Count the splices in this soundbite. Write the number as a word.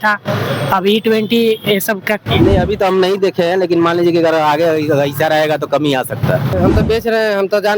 two